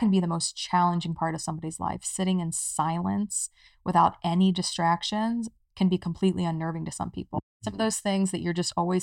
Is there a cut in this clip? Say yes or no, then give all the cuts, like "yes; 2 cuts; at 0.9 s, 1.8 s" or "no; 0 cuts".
yes; 1 cut; at 7.4 s